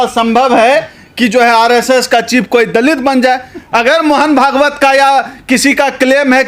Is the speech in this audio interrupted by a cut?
yes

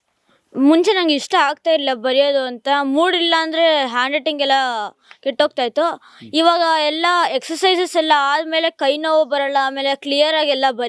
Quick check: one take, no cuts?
yes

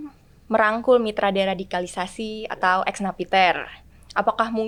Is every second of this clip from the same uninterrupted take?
yes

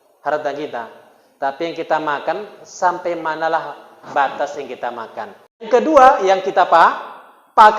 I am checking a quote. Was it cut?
yes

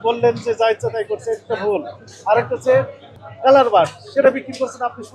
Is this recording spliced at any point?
yes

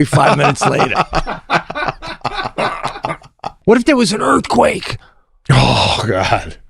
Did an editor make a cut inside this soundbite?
yes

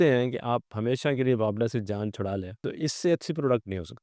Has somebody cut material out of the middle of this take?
yes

